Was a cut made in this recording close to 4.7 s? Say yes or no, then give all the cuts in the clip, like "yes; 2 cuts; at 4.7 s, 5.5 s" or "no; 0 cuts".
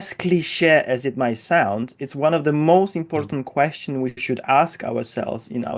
no; 0 cuts